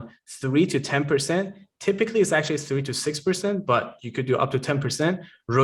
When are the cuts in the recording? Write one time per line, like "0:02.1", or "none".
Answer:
none